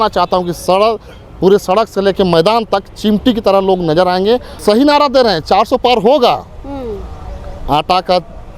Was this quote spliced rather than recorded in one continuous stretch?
yes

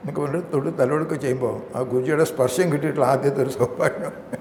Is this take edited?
no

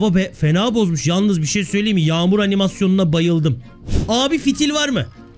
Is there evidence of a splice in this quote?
yes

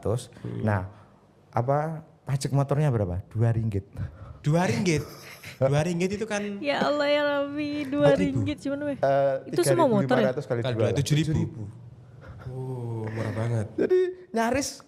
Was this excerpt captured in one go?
yes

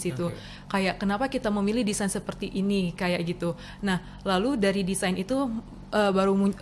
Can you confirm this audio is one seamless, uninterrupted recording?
yes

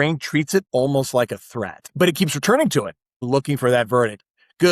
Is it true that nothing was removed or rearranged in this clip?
no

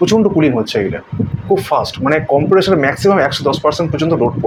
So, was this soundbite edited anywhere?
no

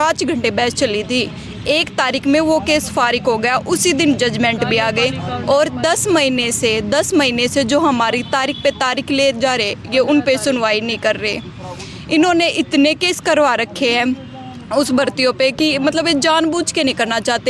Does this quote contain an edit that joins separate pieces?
no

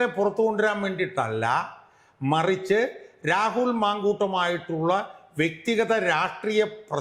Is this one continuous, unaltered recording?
yes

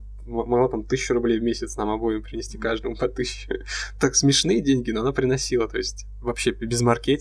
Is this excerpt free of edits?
yes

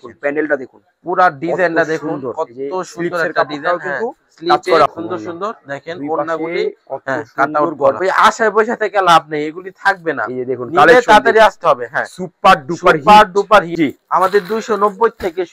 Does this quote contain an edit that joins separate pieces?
yes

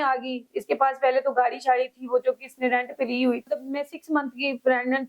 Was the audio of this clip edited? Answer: yes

